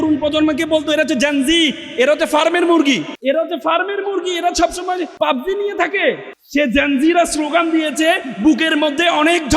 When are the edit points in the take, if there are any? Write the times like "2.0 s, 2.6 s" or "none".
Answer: 3.1 s, 5.1 s, 6.3 s